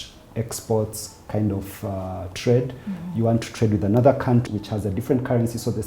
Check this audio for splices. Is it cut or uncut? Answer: cut